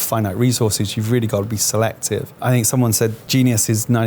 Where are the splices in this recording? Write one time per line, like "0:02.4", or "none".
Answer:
0:02.4
0:03.2

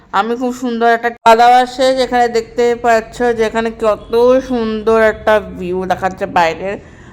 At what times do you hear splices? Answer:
0:01.1

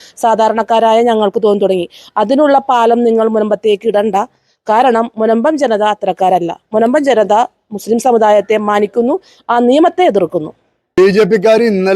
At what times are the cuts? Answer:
0:11.0

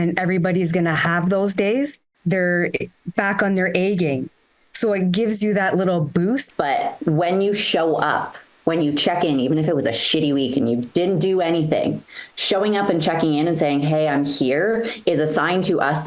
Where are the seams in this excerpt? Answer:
0:02.1
0:06.4

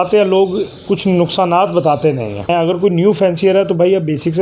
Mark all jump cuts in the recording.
0:02.5

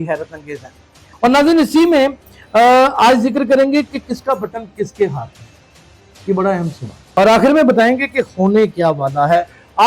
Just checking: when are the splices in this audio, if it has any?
0:01.1
0:07.0

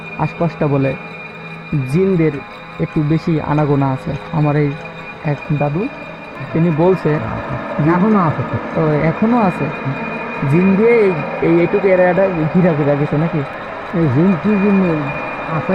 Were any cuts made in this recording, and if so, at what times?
none

